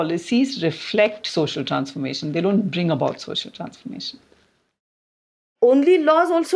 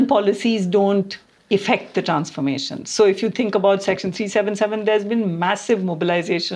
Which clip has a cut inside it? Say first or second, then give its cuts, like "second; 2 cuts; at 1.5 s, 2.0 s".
first; 1 cut; at 5.5 s